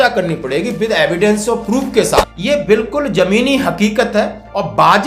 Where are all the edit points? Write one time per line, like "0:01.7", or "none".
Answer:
0:02.3